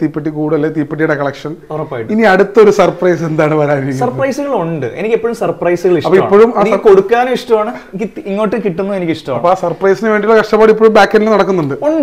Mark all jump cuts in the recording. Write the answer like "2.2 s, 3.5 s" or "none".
none